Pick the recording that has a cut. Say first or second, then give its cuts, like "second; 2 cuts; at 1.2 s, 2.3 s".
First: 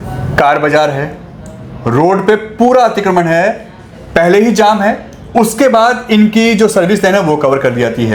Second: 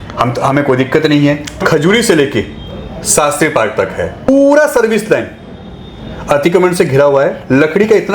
second; 2 cuts; at 1.6 s, 4.3 s